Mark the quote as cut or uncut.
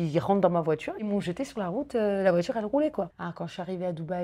cut